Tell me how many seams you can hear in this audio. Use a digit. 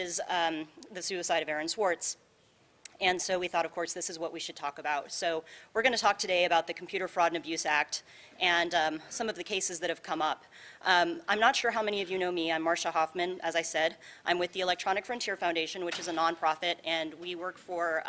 1